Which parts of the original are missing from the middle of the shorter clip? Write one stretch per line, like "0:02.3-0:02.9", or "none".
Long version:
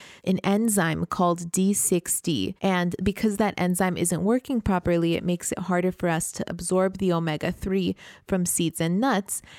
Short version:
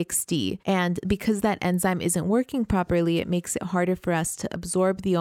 none